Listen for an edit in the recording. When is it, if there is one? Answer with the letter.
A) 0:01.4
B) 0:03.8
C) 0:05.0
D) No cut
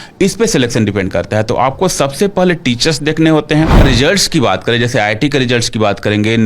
B